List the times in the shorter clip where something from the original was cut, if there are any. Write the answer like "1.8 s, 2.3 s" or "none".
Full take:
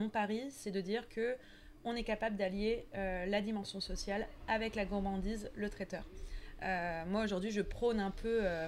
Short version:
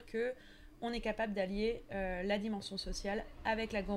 none